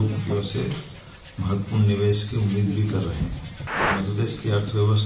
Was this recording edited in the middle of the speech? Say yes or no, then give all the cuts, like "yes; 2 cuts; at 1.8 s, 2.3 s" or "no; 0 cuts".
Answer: yes; 1 cut; at 3.9 s